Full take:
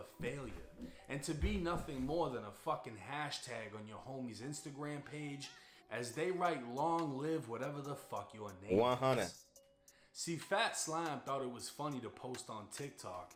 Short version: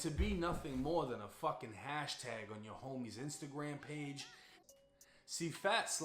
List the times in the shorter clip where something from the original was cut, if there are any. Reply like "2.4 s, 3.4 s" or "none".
4.6 s